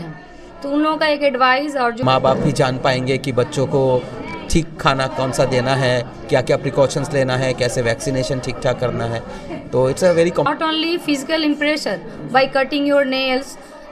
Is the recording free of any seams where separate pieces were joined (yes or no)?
no